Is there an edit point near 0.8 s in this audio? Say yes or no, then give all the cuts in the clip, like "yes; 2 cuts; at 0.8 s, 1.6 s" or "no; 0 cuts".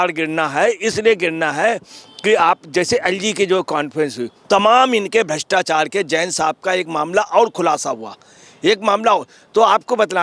no; 0 cuts